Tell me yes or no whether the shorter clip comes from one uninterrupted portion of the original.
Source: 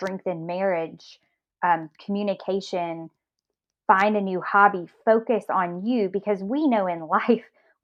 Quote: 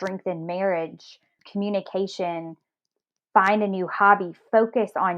no